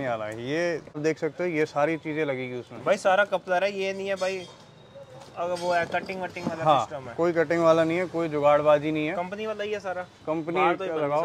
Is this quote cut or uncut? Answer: cut